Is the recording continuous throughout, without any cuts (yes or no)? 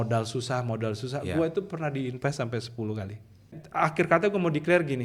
no